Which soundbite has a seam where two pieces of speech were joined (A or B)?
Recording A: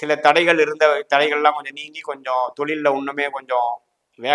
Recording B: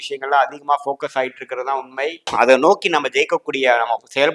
B